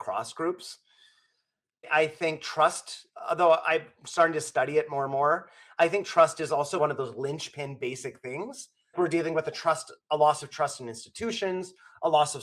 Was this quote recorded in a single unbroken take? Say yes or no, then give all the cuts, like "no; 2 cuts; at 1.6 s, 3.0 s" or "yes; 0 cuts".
yes; 0 cuts